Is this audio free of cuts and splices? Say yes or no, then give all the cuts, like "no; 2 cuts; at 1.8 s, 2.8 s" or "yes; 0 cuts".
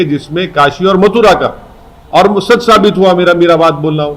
yes; 0 cuts